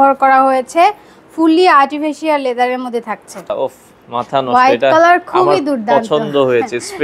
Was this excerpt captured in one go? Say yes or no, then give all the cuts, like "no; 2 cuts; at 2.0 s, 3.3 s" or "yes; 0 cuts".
no; 1 cut; at 3.5 s